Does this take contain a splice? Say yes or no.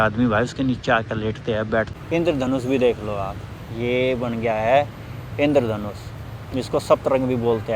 yes